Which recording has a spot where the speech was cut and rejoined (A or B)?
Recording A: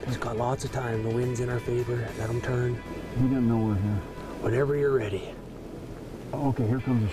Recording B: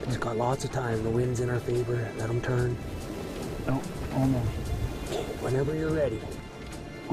A